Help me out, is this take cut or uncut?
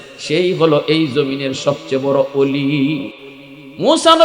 cut